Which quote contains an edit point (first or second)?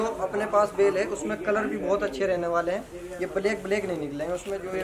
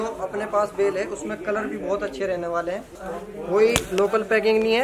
second